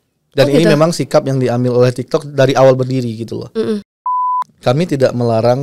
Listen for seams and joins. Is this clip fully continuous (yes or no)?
no